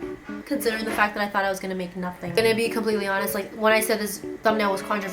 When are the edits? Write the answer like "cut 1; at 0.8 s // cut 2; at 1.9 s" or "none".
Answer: cut 1; at 2.2 s